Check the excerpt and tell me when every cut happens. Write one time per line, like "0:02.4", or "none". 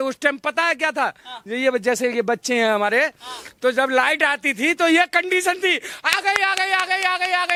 none